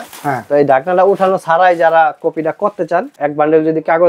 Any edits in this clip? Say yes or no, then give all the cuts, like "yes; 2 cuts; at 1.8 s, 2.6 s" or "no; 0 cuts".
yes; 1 cut; at 3.1 s